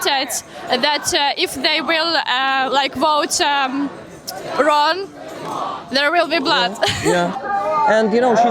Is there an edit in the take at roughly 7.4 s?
yes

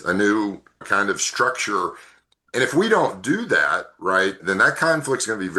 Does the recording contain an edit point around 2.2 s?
no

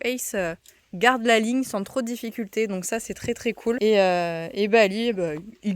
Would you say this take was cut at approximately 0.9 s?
no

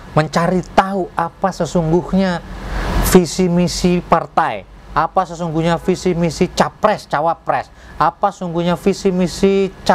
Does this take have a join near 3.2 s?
no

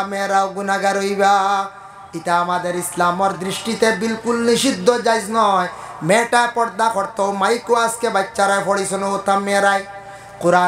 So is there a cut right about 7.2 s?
no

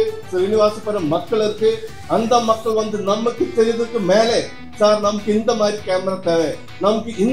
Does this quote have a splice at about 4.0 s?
no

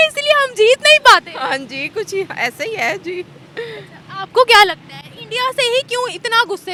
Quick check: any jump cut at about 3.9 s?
no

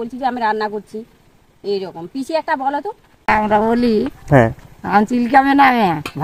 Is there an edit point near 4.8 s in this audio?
no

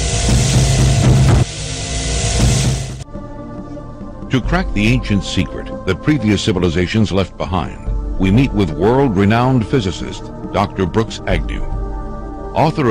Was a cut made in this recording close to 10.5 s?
no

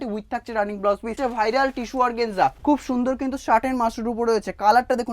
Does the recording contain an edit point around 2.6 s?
yes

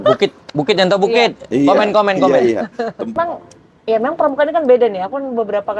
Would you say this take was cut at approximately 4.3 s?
no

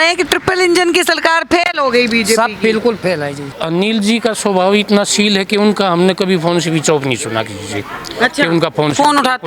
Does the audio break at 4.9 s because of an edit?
no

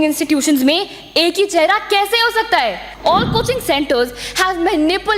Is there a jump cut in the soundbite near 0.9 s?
no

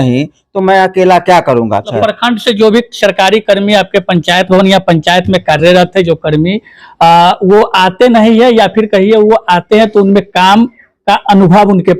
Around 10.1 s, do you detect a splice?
no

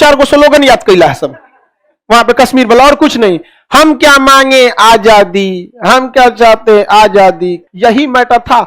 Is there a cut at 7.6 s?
yes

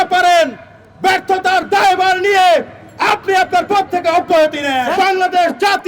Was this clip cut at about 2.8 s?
no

